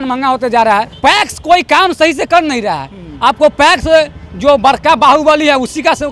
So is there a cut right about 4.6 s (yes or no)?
no